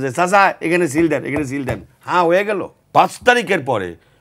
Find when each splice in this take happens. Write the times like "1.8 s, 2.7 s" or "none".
2.8 s